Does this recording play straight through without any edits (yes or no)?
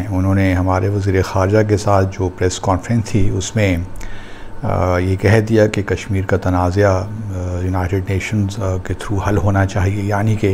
yes